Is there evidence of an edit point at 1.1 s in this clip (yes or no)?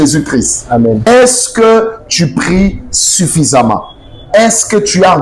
yes